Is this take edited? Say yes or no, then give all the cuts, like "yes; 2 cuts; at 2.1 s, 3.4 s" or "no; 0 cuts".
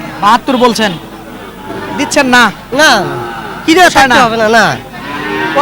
no; 0 cuts